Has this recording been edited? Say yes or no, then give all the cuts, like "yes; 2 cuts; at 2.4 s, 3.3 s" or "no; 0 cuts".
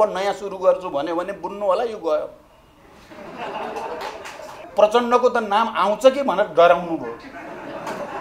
yes; 1 cut; at 4.6 s